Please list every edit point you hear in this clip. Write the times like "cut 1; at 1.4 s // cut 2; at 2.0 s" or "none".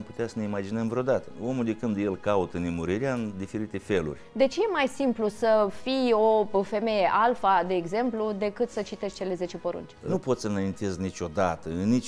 cut 1; at 1.4 s // cut 2; at 4.2 s // cut 3; at 9.9 s

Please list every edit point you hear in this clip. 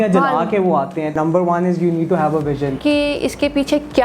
cut 1; at 1.1 s // cut 2; at 2.8 s

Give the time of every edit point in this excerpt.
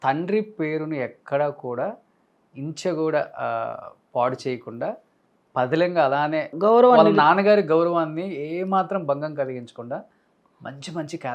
none

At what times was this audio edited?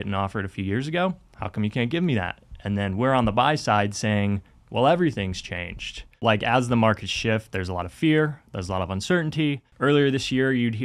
cut 1; at 1.3 s // cut 2; at 6.2 s // cut 3; at 9.7 s

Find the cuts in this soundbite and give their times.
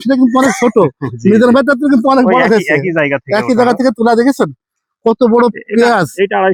none

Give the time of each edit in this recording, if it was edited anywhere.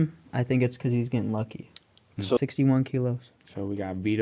cut 1; at 2.4 s

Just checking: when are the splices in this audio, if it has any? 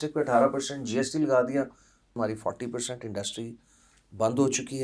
cut 1; at 2.1 s

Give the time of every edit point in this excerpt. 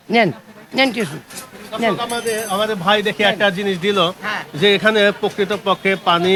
none

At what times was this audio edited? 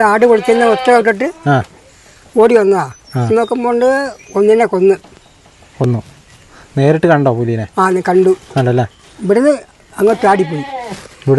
none

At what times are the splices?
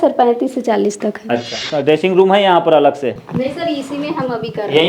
cut 1; at 1.6 s // cut 2; at 3.2 s

